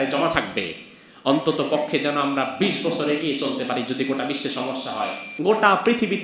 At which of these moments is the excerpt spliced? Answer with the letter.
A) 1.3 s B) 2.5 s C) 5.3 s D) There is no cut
C